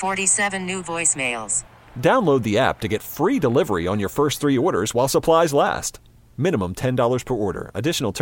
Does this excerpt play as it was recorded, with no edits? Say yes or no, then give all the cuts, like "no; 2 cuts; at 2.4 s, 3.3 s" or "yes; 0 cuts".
yes; 0 cuts